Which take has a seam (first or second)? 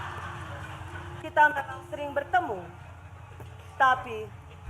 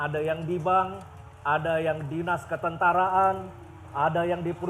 first